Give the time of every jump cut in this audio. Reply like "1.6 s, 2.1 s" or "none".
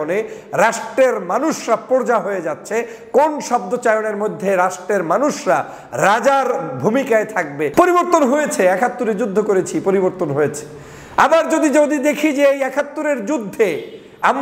7.7 s